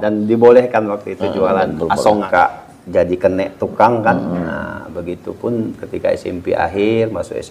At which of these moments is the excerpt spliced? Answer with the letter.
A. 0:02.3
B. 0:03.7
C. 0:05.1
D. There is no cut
A